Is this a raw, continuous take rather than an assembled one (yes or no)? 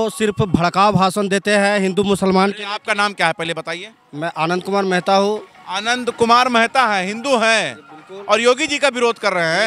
yes